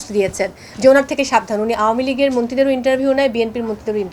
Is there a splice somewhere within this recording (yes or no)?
no